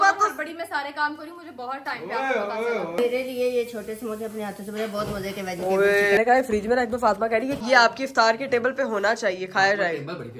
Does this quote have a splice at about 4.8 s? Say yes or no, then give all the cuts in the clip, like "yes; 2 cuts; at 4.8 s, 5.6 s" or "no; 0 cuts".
no; 3 cuts; at 2.9 s, 6.2 s, 7.6 s